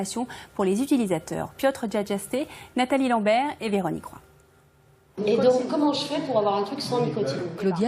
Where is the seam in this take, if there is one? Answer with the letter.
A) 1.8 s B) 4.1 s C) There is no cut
B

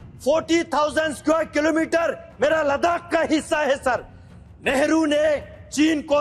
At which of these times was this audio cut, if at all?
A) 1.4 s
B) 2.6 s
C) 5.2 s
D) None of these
D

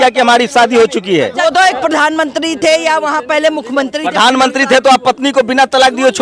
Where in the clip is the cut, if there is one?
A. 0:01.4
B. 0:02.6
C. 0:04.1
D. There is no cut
A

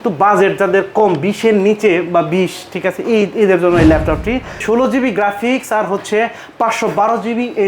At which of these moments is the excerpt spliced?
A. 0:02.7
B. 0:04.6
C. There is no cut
B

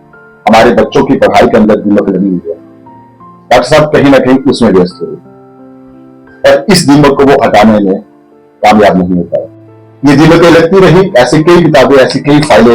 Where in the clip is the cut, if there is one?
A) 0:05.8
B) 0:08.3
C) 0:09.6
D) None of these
D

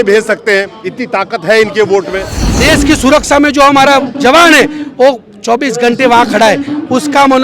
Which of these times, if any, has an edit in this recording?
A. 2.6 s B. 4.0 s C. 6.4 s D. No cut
A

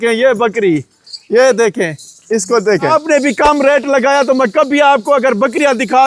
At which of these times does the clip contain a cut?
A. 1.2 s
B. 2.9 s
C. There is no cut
B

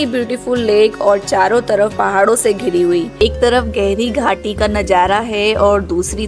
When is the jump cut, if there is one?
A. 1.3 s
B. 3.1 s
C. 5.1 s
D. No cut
B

